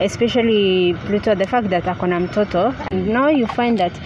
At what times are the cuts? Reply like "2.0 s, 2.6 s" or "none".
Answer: 3.1 s